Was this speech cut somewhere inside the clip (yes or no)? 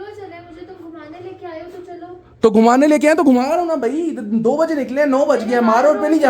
no